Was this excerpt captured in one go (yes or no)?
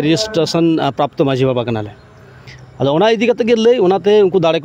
yes